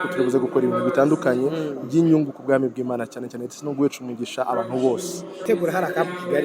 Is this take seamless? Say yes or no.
no